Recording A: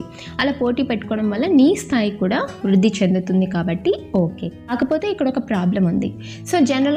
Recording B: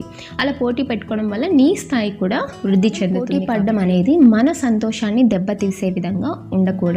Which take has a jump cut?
B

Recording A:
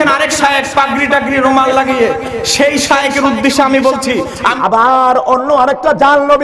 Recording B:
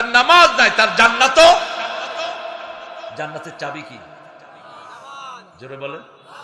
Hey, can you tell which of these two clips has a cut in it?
A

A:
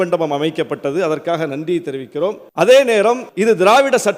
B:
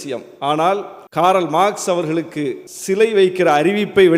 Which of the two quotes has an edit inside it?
A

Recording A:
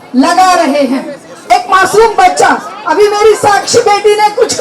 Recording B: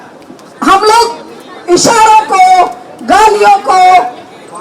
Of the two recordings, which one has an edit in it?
A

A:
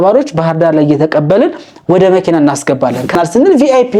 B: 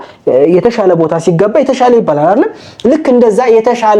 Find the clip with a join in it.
A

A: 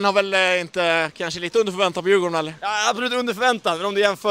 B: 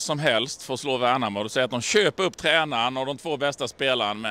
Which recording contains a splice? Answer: A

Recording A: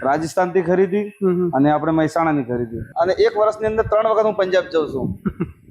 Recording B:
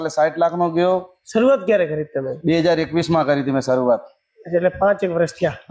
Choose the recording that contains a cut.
A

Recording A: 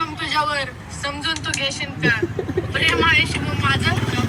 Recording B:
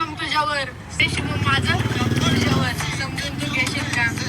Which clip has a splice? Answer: B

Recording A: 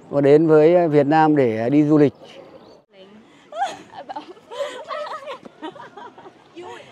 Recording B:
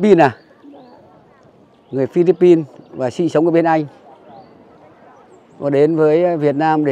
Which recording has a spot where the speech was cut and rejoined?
A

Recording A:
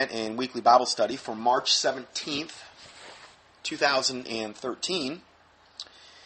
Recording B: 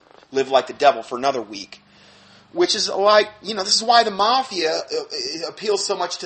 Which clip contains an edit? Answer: B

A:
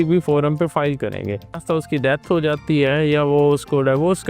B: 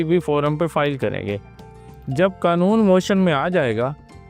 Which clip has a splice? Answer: A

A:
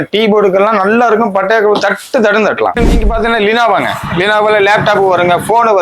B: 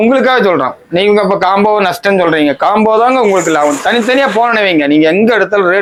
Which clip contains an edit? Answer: A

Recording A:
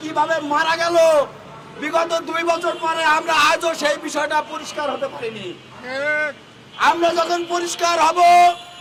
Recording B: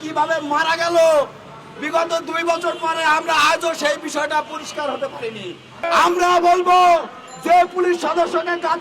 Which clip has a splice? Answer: B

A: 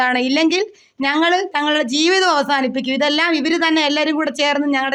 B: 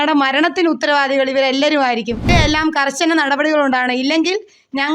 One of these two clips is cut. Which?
B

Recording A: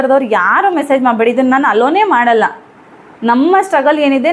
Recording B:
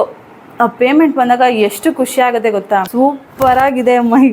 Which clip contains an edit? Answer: B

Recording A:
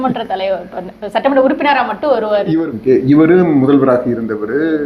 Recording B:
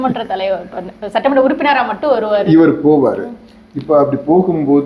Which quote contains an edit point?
A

